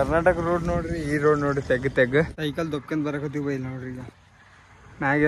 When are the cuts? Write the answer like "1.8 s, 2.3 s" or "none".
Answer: 2.4 s